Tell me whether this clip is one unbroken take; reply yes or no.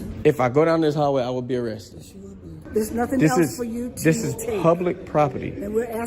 no